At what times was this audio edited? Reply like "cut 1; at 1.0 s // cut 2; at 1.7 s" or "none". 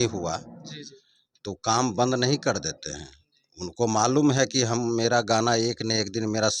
none